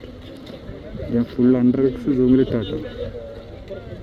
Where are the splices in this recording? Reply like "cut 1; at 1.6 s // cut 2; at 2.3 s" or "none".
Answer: none

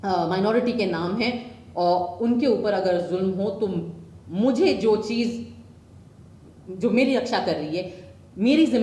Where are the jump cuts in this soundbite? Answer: none

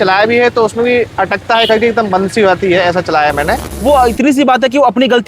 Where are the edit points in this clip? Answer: cut 1; at 3.7 s

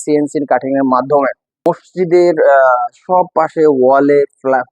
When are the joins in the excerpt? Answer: cut 1; at 1.6 s

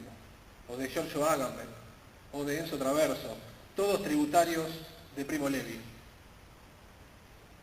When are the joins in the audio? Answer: cut 1; at 3.9 s

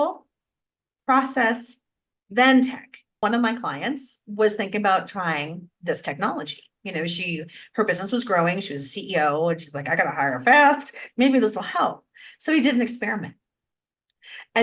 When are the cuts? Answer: cut 1; at 3.1 s

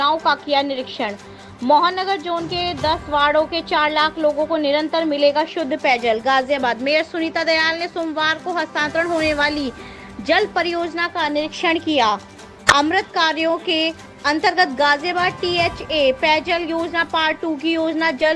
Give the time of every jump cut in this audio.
none

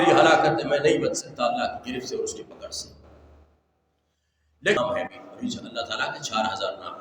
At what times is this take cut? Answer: cut 1; at 4.8 s

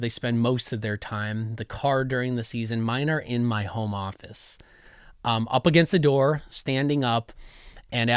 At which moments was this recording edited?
none

